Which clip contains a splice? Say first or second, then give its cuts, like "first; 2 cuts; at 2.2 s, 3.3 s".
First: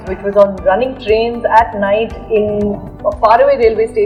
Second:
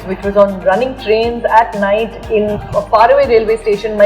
second; 1 cut; at 2.5 s